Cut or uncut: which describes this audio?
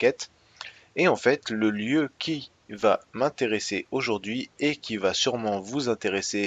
uncut